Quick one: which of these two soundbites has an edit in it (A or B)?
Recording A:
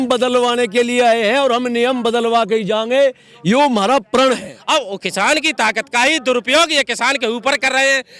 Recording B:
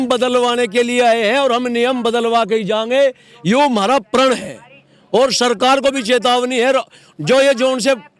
A